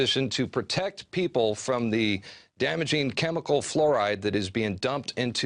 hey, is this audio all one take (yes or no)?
no